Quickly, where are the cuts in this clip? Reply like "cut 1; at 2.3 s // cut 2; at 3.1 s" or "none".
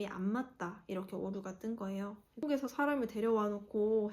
cut 1; at 2.4 s